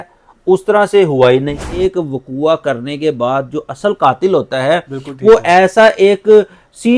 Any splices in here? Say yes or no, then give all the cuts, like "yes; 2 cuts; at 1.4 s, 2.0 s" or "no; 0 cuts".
yes; 1 cut; at 1.8 s